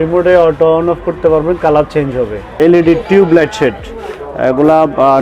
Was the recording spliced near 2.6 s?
yes; 1 cut; at 2.6 s

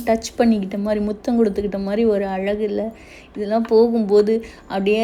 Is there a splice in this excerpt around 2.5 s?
no; 0 cuts

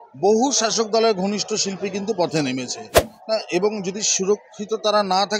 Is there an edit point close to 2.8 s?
yes; 1 cut; at 2.8 s

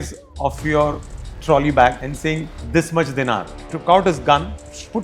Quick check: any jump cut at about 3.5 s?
yes; 2 cuts; at 2.1 s, 3.5 s

